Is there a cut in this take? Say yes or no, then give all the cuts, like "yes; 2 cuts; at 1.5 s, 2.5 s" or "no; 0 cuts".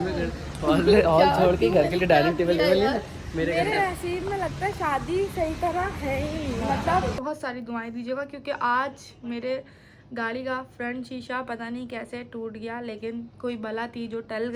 yes; 1 cut; at 7.2 s